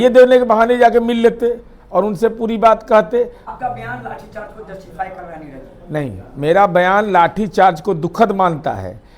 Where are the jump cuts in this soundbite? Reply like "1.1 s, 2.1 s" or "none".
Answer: 3.5 s